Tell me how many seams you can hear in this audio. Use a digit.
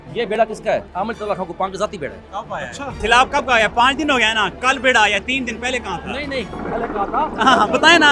2